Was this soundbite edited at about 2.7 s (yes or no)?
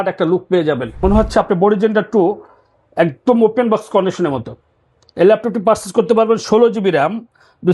no